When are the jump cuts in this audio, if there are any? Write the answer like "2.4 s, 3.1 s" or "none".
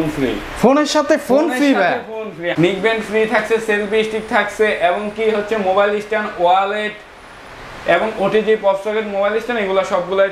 2.5 s

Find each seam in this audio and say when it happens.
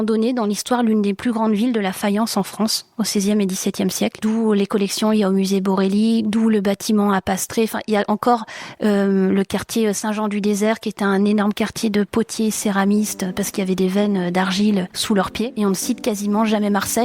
15.4 s

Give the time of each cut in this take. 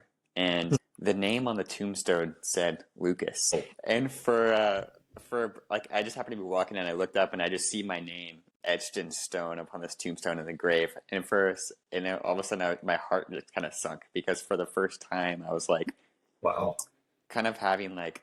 0.9 s, 3.5 s

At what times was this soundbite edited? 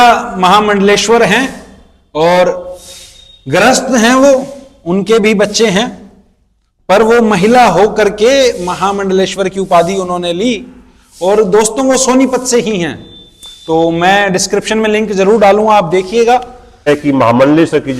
16.9 s

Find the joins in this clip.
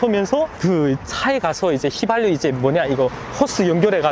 none

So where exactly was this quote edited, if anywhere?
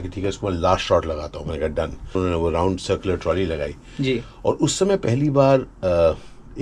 2.1 s

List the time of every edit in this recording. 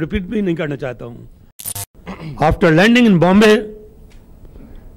1.7 s

